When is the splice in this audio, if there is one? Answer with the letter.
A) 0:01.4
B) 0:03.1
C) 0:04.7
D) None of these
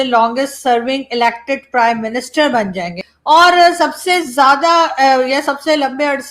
B